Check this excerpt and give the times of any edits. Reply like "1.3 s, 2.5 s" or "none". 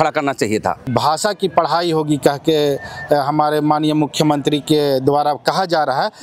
0.9 s

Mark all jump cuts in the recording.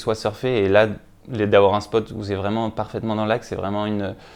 none

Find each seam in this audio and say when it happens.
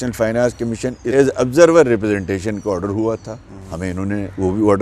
1.0 s

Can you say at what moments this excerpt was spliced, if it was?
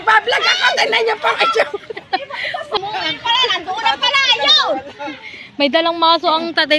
2.8 s

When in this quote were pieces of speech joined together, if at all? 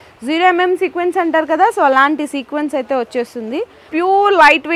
3.9 s

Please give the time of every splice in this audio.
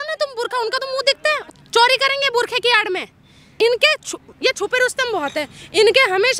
1.4 s, 3.5 s

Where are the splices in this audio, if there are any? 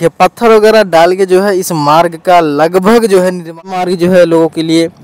3.7 s

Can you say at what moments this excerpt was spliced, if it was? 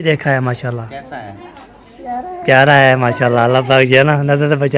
none

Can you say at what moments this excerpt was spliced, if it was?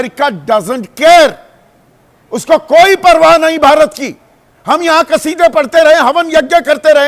none

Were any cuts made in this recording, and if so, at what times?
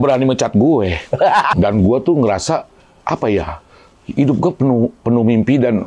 1.5 s

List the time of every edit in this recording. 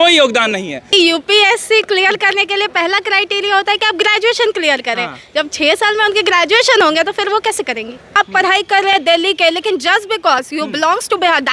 0.9 s, 8.1 s

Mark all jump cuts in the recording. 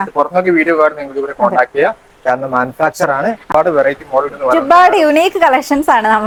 none

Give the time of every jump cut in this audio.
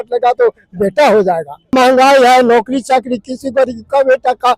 1.7 s

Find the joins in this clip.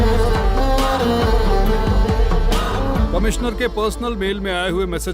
2.9 s

